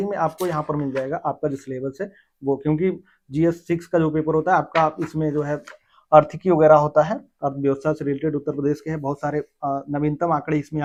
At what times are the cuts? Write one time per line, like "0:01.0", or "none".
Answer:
none